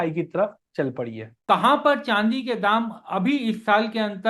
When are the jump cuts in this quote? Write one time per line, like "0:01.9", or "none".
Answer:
0:01.4